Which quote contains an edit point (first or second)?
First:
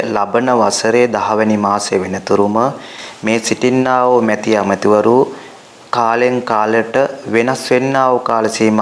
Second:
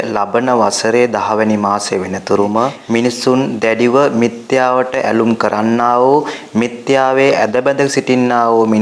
second